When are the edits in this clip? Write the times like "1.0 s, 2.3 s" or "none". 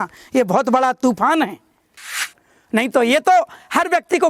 2.2 s